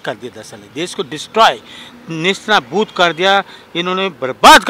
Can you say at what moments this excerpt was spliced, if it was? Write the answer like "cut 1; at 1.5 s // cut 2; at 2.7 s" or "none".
none